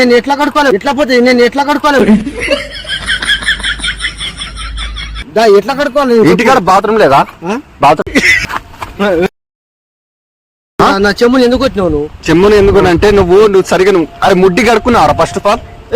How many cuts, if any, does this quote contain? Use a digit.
1